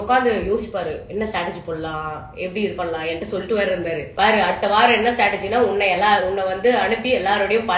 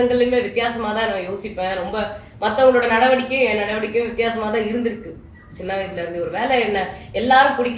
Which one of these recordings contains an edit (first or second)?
first